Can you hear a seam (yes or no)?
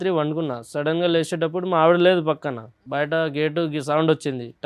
yes